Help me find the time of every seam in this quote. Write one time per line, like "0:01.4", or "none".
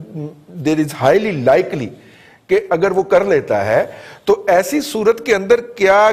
none